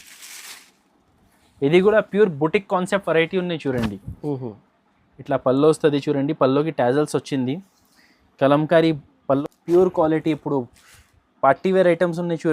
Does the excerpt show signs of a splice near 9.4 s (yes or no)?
yes